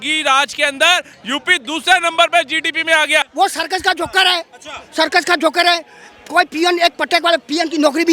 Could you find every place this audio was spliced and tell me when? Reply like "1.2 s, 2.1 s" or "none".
3.3 s